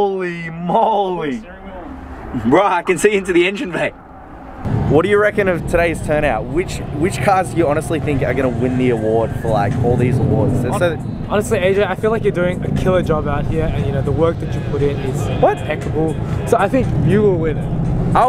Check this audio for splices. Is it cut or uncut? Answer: cut